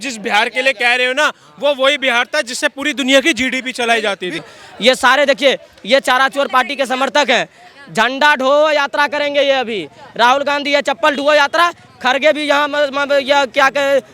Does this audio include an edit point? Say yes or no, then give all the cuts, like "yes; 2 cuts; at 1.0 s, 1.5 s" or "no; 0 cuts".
yes; 1 cut; at 4.5 s